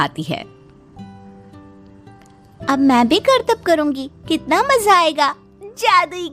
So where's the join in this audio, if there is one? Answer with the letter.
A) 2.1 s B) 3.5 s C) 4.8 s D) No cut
D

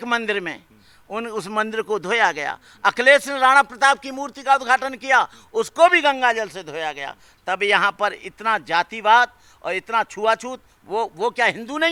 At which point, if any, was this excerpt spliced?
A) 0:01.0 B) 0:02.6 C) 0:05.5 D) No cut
D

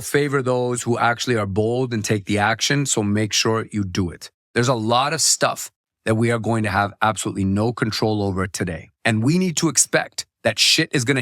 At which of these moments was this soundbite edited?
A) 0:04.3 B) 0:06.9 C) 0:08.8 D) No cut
A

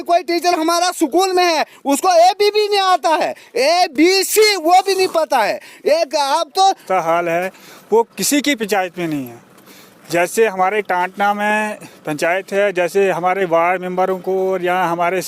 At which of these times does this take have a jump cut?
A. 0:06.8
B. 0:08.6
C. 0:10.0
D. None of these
A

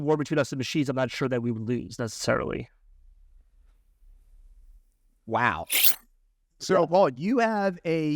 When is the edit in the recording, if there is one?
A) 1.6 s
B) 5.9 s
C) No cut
B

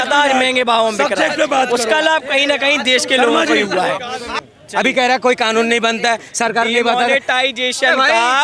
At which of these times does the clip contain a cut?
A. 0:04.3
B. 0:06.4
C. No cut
A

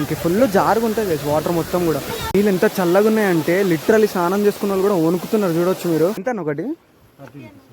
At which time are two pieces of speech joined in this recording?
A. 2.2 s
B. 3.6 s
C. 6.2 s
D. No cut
C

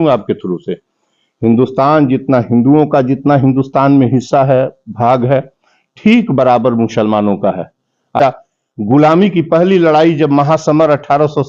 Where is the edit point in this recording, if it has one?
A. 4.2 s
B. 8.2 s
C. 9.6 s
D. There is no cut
B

